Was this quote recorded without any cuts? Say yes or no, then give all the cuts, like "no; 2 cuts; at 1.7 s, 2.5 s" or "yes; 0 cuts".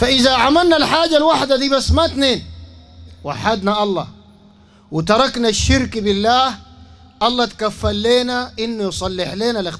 yes; 0 cuts